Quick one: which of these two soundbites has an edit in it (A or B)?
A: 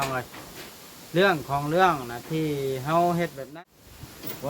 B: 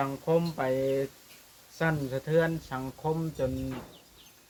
A